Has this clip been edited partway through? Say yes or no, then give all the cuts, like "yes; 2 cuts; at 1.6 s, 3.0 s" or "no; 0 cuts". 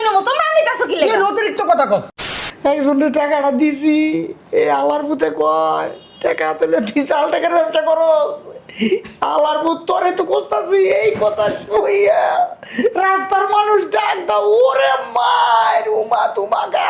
yes; 1 cut; at 2.2 s